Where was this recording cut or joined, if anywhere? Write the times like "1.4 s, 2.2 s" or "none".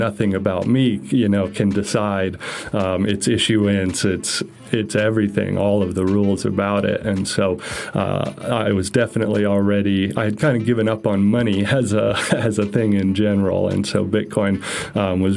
none